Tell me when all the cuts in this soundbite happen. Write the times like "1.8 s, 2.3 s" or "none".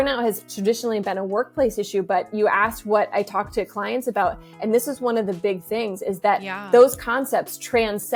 none